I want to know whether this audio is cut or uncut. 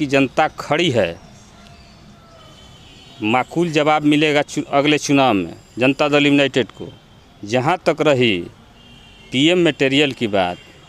uncut